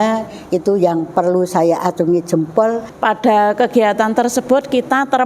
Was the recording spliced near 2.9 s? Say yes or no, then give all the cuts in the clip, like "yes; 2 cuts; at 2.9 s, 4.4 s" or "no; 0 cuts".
yes; 1 cut; at 2.9 s